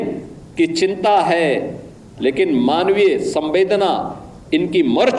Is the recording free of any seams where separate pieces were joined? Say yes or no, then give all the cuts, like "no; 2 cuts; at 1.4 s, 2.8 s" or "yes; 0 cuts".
yes; 0 cuts